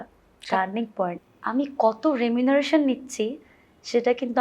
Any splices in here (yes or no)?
yes